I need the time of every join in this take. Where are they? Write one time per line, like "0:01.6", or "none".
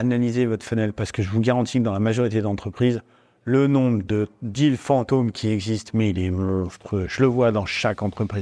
none